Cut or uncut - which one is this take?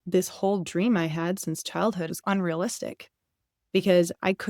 cut